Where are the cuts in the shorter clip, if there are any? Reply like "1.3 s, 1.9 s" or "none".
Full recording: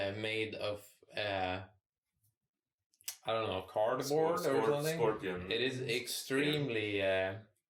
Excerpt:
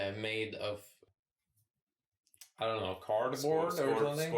1.0 s